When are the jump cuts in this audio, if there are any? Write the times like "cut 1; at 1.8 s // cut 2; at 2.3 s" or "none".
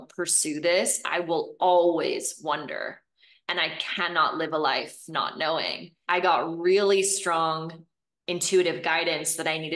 cut 1; at 5.9 s